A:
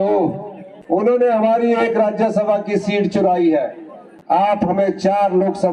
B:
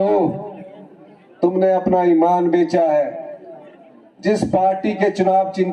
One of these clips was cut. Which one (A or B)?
A